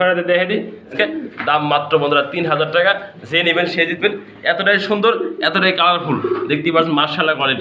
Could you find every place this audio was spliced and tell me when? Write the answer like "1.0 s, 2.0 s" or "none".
0.9 s